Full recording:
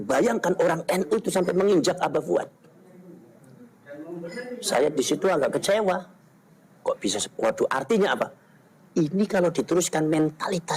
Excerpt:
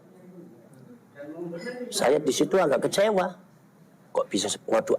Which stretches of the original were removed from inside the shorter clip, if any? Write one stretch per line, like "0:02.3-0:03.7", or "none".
none